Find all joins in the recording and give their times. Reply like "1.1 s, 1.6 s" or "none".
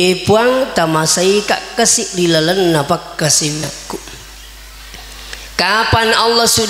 none